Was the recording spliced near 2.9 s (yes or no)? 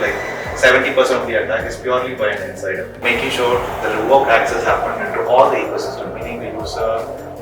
yes